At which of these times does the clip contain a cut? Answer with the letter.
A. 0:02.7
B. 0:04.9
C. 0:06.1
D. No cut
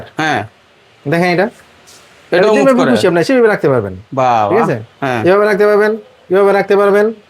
D